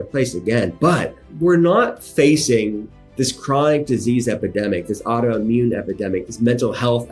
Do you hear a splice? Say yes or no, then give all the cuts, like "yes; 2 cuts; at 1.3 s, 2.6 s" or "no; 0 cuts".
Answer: yes; 1 cut; at 1.2 s